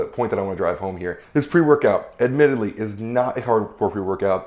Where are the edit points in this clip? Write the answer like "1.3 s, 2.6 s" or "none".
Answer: 1.2 s